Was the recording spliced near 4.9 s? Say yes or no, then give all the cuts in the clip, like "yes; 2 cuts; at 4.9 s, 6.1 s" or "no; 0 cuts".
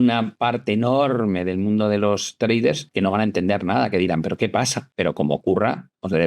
yes; 1 cut; at 4.9 s